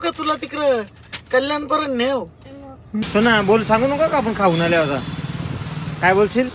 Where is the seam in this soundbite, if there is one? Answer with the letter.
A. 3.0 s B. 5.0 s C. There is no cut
A